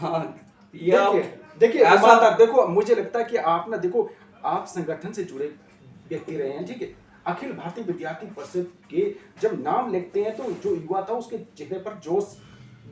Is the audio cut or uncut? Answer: uncut